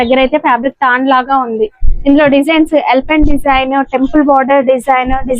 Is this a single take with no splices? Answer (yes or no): yes